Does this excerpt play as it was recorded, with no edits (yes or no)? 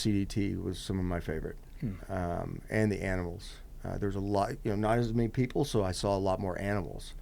yes